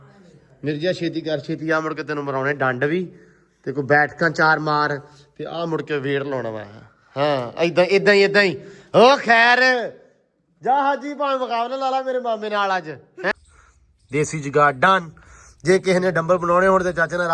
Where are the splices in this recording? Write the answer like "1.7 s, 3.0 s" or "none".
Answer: 13.3 s